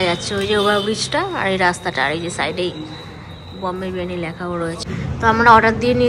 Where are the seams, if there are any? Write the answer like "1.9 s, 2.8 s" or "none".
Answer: 4.8 s